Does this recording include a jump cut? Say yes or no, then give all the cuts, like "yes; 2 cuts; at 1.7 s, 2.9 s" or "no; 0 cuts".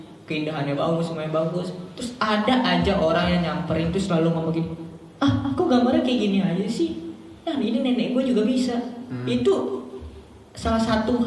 no; 0 cuts